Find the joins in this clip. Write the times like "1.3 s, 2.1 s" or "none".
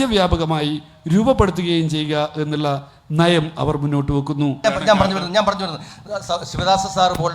4.6 s